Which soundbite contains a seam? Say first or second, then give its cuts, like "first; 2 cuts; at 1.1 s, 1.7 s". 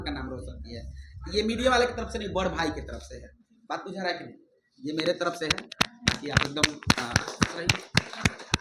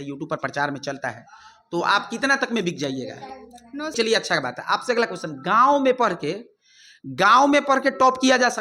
second; 1 cut; at 3.9 s